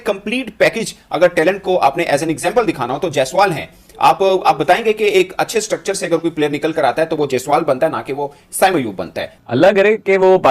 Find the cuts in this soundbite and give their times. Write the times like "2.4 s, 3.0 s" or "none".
9.3 s